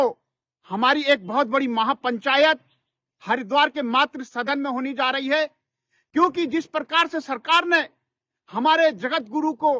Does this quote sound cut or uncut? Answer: uncut